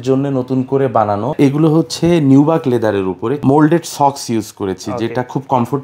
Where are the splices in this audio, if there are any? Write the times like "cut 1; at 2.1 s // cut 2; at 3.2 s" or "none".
cut 1; at 1.3 s // cut 2; at 3.4 s

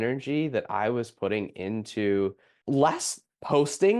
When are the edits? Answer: none

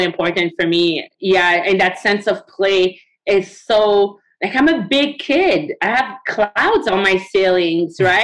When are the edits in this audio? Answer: cut 1; at 1.1 s

